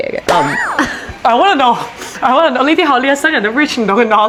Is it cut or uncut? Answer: uncut